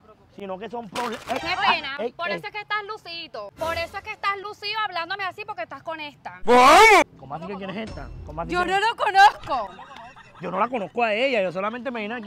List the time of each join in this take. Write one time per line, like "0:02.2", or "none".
none